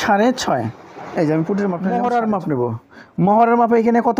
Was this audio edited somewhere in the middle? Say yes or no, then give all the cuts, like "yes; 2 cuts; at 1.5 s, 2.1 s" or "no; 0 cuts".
yes; 1 cut; at 1.9 s